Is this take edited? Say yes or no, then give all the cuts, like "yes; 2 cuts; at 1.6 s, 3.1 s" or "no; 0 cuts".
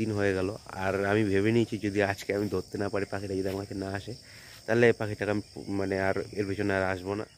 no; 0 cuts